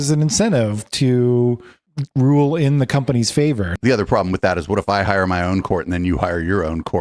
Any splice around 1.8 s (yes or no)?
no